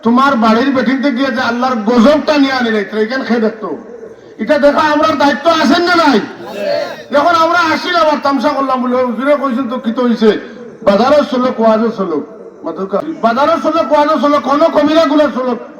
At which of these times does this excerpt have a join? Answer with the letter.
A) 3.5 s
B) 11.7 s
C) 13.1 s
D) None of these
C